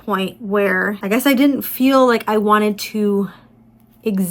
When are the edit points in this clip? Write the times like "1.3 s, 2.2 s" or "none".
1.0 s